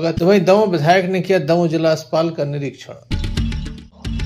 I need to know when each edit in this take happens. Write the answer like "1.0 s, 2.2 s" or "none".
3.1 s